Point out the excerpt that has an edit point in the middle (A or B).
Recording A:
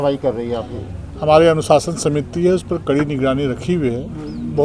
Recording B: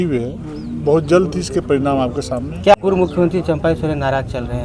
B